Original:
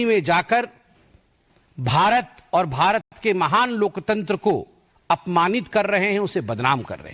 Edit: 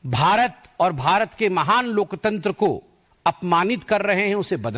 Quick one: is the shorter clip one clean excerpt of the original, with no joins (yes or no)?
no